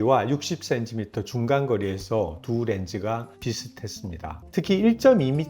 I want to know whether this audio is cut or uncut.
cut